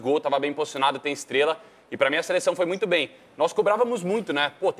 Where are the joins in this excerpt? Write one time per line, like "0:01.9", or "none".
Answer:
none